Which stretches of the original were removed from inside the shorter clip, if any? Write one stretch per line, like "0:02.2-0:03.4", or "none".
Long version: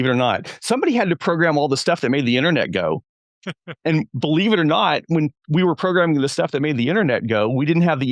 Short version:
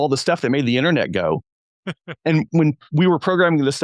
0:04.1-0:05.0